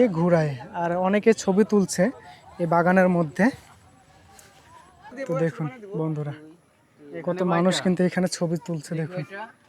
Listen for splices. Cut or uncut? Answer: cut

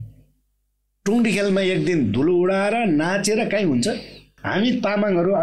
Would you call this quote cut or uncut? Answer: cut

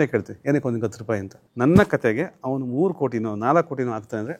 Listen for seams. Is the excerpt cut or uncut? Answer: cut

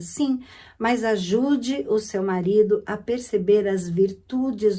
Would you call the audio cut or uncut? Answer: uncut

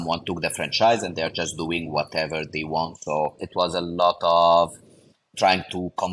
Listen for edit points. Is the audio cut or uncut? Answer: cut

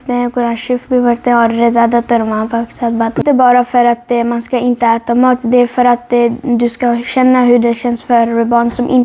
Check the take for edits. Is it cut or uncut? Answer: cut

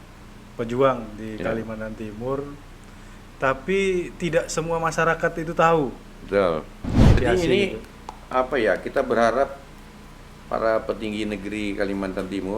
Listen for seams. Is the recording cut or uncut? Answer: cut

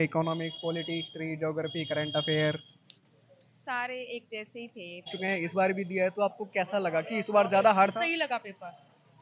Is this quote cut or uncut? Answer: cut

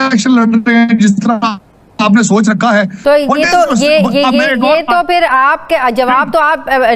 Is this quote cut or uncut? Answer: cut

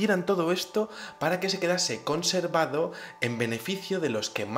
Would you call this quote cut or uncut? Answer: uncut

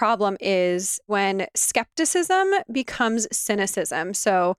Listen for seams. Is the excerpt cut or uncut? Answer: cut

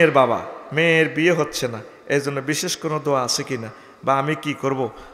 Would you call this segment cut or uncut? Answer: uncut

